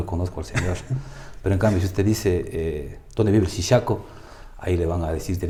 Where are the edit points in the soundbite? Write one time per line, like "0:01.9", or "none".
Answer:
none